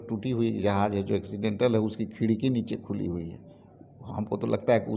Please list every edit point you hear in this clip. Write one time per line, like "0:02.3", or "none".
none